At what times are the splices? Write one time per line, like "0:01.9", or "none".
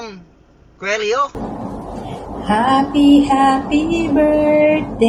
0:01.3